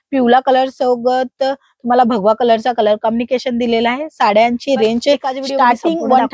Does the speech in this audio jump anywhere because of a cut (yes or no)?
no